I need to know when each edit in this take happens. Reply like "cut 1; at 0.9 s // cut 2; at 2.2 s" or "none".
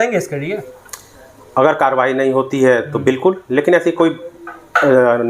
none